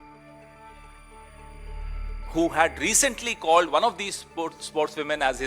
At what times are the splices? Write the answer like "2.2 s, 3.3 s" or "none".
0.9 s, 2.3 s